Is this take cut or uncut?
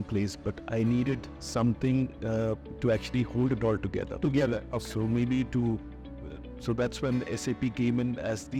uncut